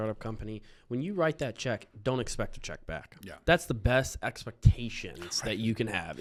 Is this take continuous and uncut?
yes; 0 cuts

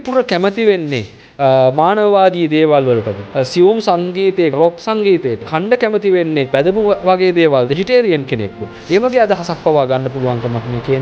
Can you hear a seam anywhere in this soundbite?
yes; 5 cuts; at 3.2 s, 4.5 s, 5.5 s, 6.5 s, 7.8 s

